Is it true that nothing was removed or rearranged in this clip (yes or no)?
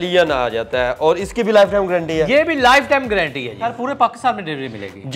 no